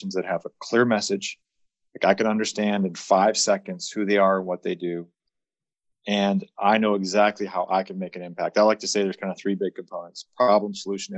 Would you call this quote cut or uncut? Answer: uncut